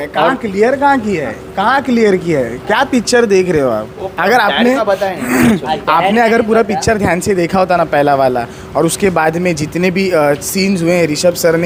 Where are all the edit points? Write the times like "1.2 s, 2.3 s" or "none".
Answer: none